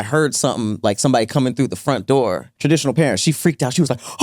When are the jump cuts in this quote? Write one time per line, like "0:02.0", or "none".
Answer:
0:02.5